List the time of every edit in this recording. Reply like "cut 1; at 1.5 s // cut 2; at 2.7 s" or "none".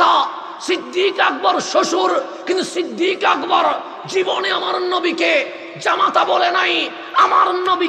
none